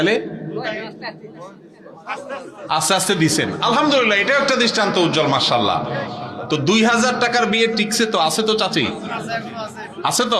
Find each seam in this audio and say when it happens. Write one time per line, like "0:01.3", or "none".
none